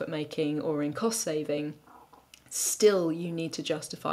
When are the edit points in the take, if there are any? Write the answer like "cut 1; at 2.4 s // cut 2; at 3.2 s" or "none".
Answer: none